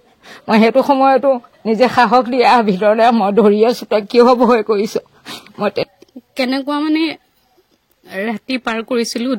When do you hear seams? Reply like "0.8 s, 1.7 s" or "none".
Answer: 5.8 s